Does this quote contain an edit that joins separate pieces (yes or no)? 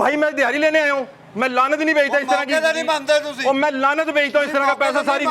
no